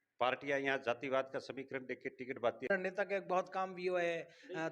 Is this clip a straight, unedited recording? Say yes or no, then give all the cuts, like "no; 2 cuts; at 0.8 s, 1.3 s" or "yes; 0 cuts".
no; 1 cut; at 2.7 s